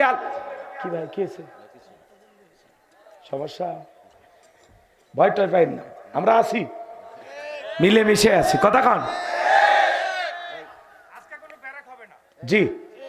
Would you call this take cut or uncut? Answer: uncut